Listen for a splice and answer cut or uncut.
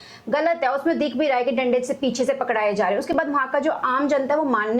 uncut